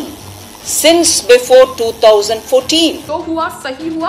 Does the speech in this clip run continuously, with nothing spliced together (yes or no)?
no